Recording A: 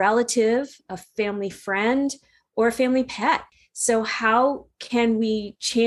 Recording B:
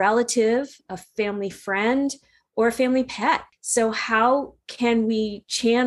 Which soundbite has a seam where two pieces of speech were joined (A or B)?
B